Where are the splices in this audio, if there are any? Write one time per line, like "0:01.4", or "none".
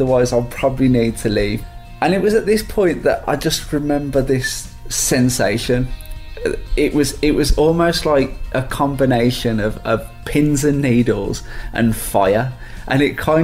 0:01.6